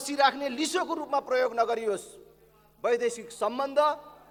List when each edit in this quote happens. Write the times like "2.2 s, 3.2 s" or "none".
none